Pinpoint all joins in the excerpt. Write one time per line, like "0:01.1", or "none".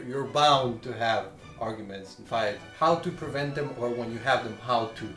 0:02.6

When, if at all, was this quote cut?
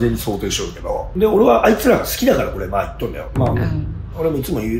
0:01.1

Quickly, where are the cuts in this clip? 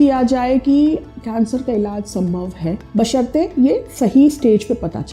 0:02.8

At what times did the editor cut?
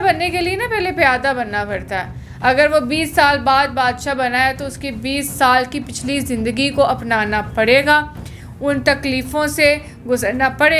none

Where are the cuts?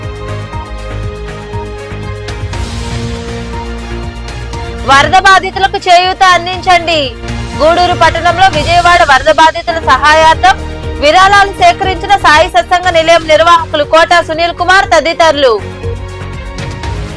0:02.4

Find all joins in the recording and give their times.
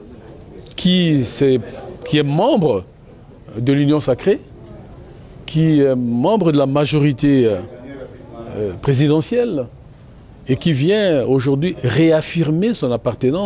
none

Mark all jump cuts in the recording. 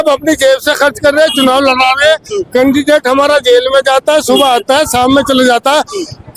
none

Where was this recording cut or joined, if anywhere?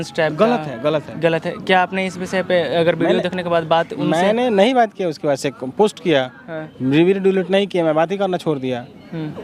none

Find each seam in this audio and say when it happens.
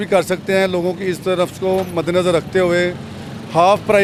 none

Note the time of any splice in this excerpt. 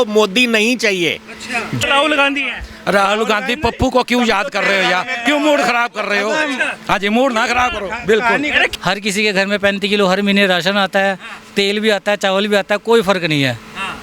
0:01.8
0:08.7

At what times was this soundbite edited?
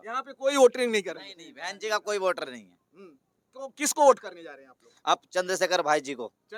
none

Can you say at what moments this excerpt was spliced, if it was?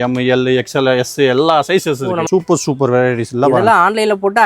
0:02.2

